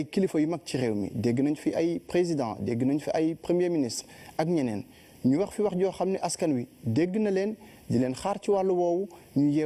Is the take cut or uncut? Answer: uncut